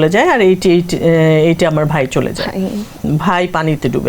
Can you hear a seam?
yes; 1 cut; at 3.0 s

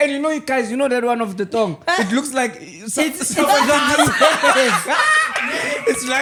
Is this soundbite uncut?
yes; 0 cuts

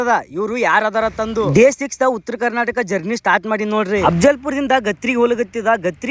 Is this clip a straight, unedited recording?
yes; 0 cuts

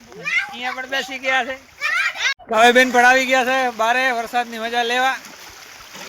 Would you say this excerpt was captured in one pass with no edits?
yes; 0 cuts

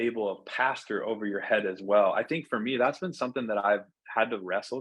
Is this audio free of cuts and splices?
yes; 0 cuts

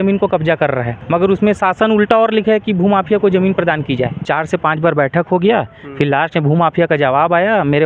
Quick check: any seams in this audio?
yes; 2 cuts; at 1.0 s, 4.2 s

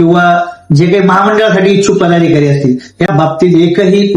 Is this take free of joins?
no; 1 cut; at 3.1 s

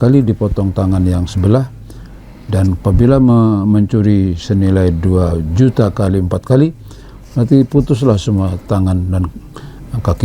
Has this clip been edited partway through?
no; 0 cuts

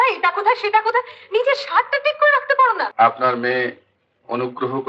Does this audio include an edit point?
yes; 1 cut; at 2.9 s

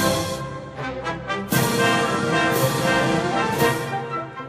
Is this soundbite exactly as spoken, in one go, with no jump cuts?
yes; 0 cuts

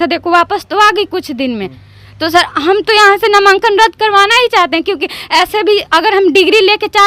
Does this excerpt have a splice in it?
no; 0 cuts

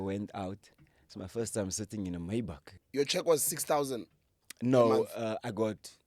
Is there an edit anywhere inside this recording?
yes; 1 cut; at 2.8 s

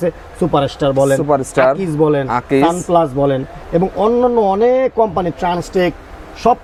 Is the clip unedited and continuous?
yes; 0 cuts

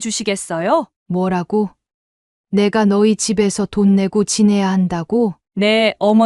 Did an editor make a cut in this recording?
yes; 1 cut; at 1.0 s

